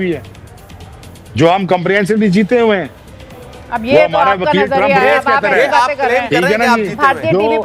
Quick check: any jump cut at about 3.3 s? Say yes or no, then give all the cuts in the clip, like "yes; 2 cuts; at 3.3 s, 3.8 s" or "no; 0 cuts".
no; 0 cuts